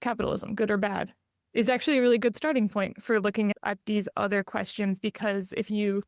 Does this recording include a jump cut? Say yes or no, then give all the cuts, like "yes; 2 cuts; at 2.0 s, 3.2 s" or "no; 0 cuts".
no; 0 cuts